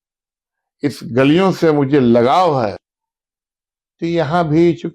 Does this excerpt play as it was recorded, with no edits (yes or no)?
no